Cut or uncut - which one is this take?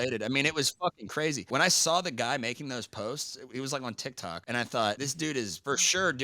cut